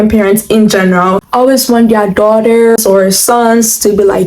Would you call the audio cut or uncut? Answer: cut